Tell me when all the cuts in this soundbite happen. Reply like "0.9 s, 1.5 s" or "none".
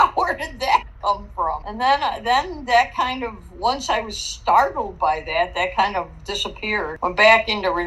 1.6 s, 6.9 s